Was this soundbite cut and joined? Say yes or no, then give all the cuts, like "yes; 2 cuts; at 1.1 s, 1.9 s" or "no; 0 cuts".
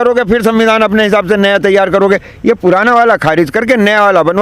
no; 0 cuts